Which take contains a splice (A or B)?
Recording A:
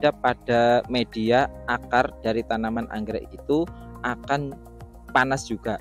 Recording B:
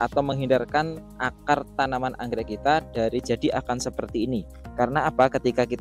B